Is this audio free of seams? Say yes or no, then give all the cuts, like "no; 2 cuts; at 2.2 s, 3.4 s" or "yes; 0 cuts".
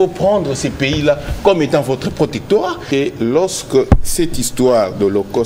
no; 1 cut; at 2.8 s